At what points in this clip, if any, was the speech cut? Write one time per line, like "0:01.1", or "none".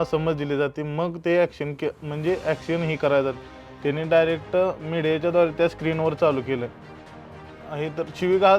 0:07.4